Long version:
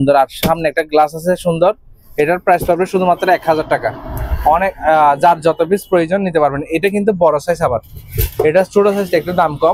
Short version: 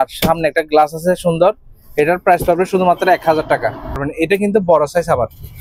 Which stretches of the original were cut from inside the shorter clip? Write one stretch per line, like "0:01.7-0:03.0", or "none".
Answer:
0:04.3-0:06.6